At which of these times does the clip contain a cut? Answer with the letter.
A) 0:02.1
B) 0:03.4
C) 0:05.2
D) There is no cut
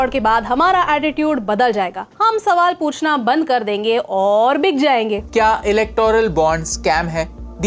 C